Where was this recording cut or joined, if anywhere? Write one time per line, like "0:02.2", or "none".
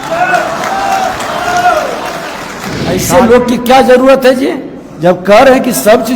0:03.0